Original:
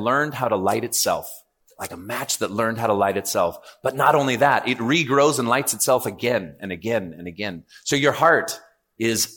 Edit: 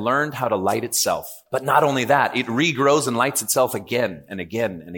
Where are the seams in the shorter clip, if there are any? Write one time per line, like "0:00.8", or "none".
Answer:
0:01.4